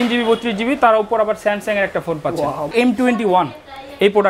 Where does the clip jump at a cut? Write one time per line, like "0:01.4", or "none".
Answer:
0:02.7